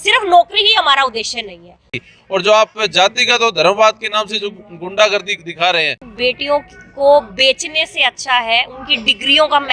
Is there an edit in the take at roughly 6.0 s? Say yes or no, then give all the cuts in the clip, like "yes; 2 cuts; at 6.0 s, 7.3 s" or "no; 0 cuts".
yes; 2 cuts; at 1.9 s, 6.0 s